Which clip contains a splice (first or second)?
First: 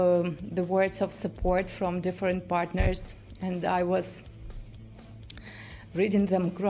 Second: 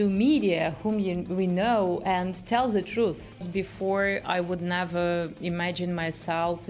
second